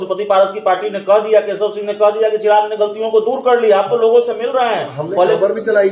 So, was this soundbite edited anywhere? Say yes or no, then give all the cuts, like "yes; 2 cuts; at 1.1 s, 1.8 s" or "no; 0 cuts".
no; 0 cuts